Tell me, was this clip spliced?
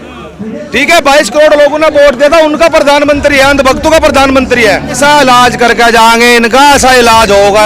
yes; 1 cut; at 5.0 s

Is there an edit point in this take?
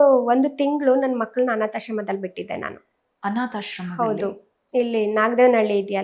no; 0 cuts

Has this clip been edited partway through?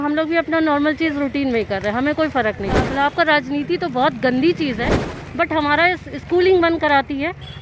yes; 2 cuts; at 2.9 s, 5.1 s

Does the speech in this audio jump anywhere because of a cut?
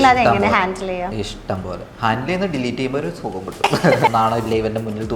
yes; 1 cut; at 4.1 s

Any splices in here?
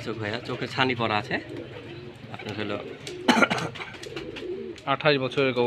no; 0 cuts

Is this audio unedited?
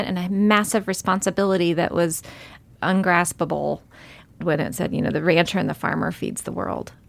no; 2 cuts; at 2.6 s, 4.4 s

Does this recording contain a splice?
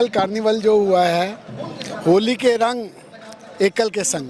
no; 0 cuts

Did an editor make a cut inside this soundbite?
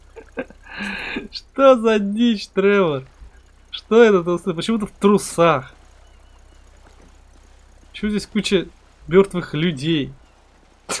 no; 0 cuts

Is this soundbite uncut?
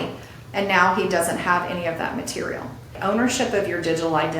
no; 1 cut; at 2.9 s

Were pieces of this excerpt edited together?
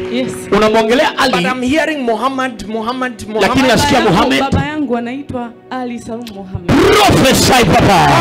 no; 0 cuts

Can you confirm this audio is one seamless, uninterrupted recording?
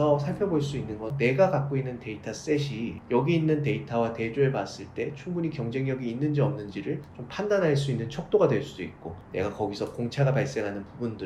no; 1 cut; at 1.1 s

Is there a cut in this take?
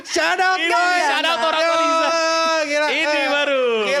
no; 0 cuts

